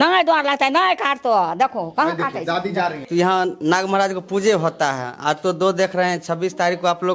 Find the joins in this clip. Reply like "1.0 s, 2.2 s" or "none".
3.0 s